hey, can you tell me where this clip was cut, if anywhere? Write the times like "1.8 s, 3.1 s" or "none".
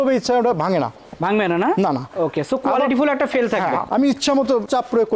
3.8 s